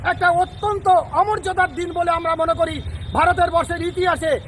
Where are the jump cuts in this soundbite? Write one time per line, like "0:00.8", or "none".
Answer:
none